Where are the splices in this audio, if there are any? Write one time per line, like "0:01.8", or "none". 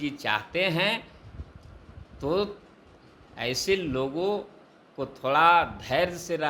none